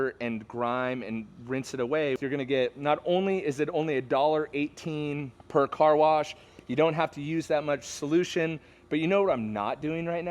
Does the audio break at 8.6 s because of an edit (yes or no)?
no